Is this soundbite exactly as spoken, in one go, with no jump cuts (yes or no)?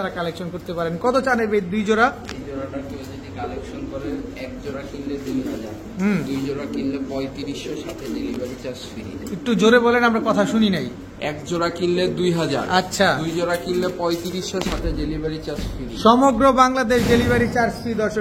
yes